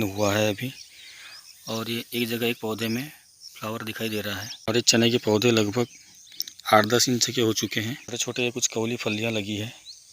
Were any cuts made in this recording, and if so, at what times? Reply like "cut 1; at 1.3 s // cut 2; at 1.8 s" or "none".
cut 1; at 4.5 s // cut 2; at 8.1 s